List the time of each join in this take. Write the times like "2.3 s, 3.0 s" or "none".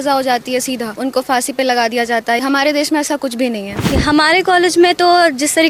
1.0 s, 2.4 s, 3.8 s